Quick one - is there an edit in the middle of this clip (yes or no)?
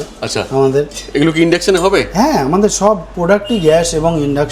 no